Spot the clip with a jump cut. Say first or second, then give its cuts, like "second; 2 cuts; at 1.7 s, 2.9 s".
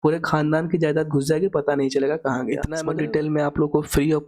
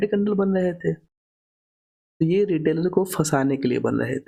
first; 1 cut; at 2.7 s